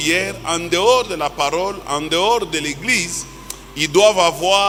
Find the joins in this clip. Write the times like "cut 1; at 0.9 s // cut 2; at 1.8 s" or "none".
none

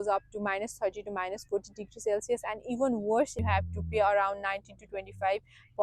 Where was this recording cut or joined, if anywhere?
cut 1; at 3.4 s

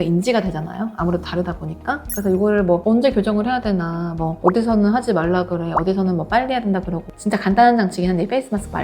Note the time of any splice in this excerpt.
cut 1; at 7.1 s

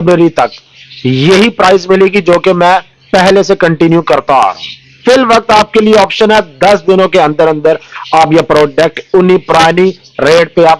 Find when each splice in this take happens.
cut 1; at 4.9 s

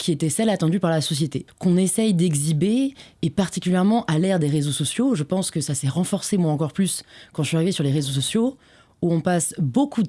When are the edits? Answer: cut 1; at 1.4 s

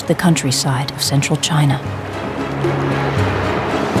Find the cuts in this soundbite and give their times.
cut 1; at 3.1 s

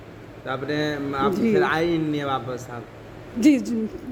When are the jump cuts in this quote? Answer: none

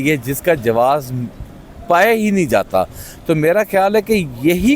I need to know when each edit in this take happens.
none

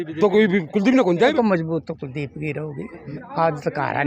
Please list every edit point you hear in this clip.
cut 1; at 1.3 s // cut 2; at 3.0 s

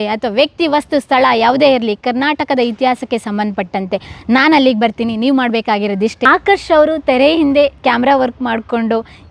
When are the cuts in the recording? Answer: cut 1; at 6.3 s

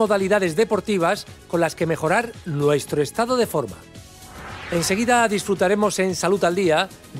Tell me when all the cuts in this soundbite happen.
cut 1; at 4.1 s

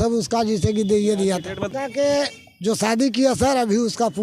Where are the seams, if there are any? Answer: cut 1; at 1.7 s

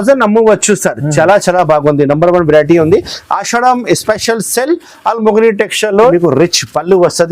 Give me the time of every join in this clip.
cut 1; at 6.1 s

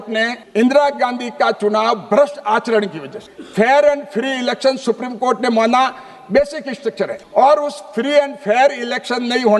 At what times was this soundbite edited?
none

